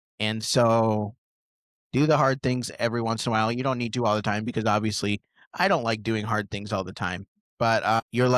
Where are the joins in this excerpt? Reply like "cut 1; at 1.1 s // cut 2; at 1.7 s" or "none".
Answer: none